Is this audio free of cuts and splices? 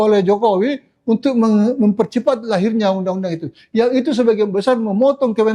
yes; 0 cuts

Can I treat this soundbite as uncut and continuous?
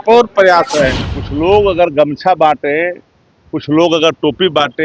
no; 1 cut; at 1.0 s

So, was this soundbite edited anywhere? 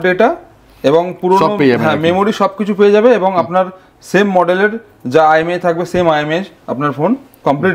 no; 0 cuts

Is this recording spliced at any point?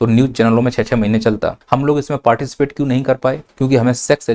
yes; 2 cuts; at 1.6 s, 3.5 s

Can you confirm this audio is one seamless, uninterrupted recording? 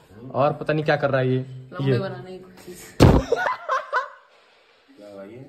yes; 0 cuts

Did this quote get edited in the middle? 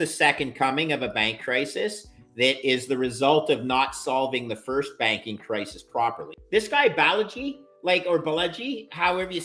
yes; 1 cut; at 6.3 s

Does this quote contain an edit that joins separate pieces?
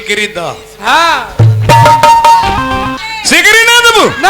yes; 1 cut; at 3.0 s

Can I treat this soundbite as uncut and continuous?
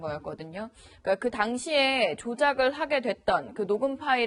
no; 1 cut; at 2.5 s

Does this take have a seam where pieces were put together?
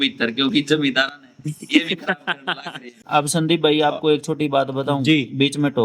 yes; 1 cut; at 3.0 s

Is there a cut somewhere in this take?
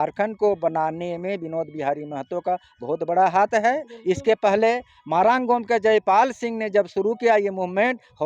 no; 0 cuts

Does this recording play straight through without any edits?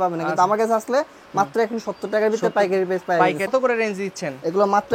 no; 1 cut; at 3.5 s

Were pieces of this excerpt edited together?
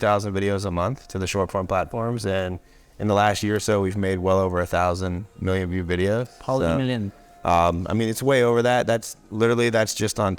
no; 0 cuts

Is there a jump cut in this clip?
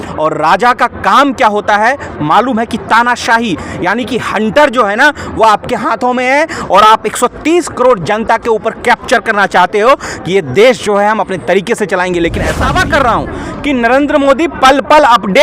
yes; 1 cut; at 12.7 s

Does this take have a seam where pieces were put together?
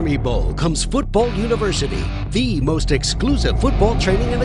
no; 0 cuts

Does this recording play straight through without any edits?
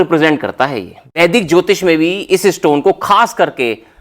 no; 1 cut; at 1.2 s

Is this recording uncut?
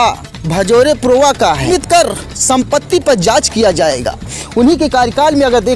no; 1 cut; at 1.7 s

